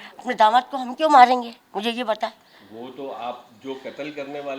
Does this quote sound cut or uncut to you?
uncut